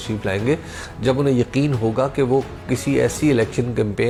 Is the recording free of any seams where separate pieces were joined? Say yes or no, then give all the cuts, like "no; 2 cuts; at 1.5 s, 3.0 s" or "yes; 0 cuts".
yes; 0 cuts